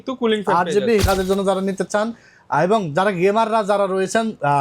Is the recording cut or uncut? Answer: cut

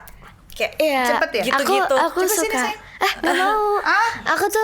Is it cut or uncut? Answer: uncut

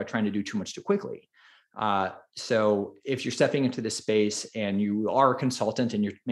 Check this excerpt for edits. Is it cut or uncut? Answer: uncut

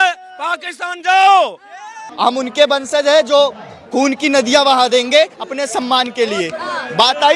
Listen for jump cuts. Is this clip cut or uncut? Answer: cut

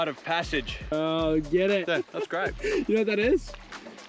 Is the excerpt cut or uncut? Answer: cut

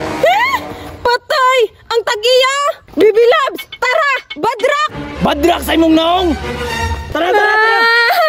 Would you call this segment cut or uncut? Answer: uncut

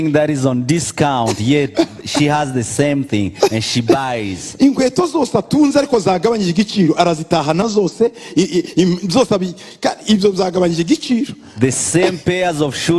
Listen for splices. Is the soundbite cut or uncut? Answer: uncut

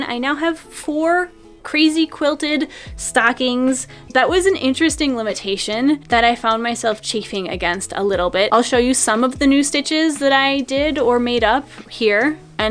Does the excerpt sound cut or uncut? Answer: cut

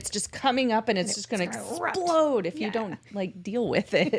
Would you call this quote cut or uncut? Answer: uncut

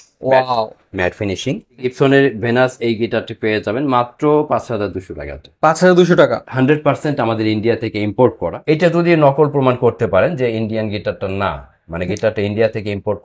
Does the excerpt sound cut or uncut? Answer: cut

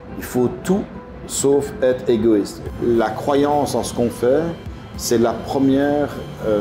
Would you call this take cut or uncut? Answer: cut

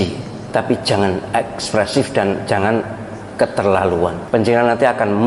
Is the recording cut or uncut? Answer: uncut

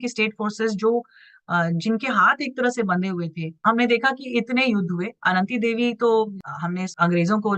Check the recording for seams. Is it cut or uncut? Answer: cut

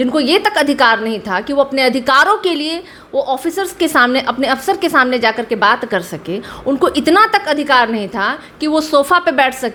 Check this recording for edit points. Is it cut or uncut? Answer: uncut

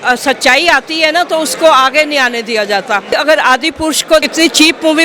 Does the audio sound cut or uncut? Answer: cut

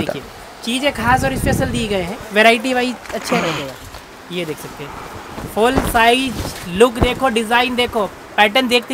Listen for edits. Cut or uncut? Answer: uncut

